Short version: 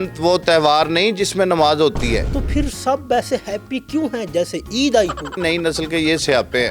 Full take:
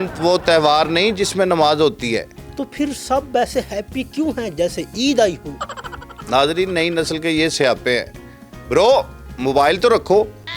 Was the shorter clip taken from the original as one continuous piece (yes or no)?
no